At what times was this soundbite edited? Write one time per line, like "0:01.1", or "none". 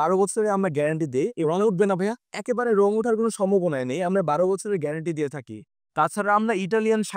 none